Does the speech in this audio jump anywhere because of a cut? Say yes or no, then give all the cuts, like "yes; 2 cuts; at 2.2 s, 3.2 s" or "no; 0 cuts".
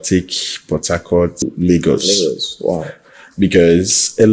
yes; 1 cut; at 1.4 s